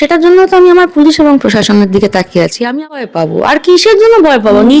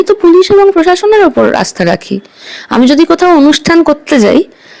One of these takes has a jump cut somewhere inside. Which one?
first; 1 cut; at 3.0 s

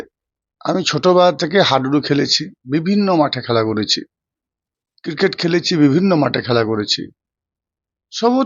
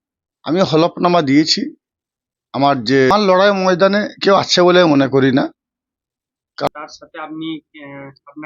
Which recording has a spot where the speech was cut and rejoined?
second; 2 cuts; at 3.1 s, 6.7 s

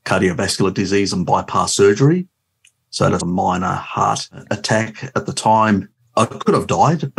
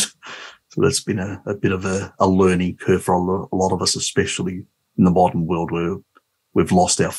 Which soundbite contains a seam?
first; 2 cuts; at 4.5 s, 6.0 s

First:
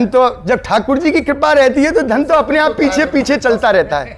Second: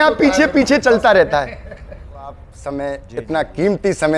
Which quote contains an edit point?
second; 1 cut; at 2.5 s

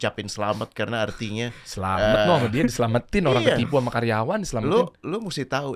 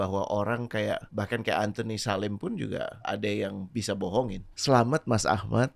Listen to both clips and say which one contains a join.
second; 3 cuts; at 1.1 s, 3.0 s, 4.5 s

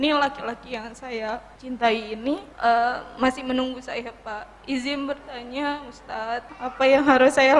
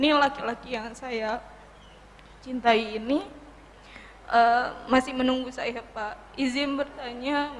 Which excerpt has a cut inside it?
first; 3 cuts; at 1.5 s, 2.5 s, 6.5 s

